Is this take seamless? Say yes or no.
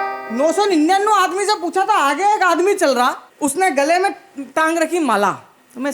no